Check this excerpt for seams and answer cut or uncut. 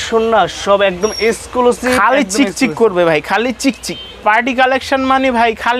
uncut